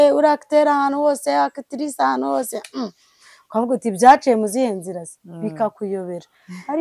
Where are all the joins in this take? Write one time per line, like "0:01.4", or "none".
none